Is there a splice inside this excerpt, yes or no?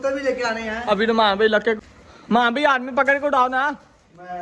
yes